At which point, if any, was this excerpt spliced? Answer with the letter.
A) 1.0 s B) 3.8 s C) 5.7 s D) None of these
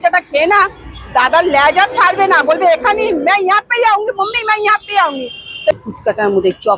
C